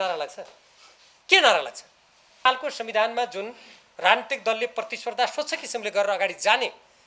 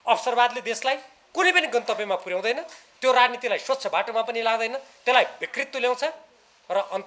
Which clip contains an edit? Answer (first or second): first